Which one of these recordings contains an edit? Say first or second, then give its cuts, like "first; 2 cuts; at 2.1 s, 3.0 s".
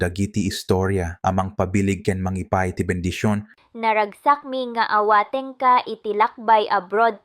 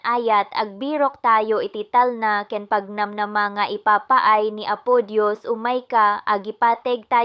first; 1 cut; at 3.6 s